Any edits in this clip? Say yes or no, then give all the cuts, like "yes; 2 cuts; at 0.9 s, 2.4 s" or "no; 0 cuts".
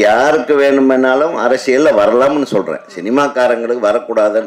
no; 0 cuts